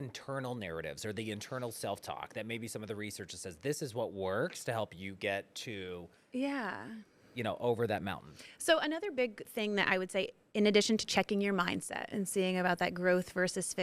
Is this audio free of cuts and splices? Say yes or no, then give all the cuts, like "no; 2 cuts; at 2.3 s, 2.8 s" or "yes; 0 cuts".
yes; 0 cuts